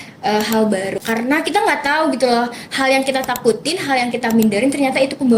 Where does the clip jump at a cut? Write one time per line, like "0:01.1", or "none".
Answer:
0:01.0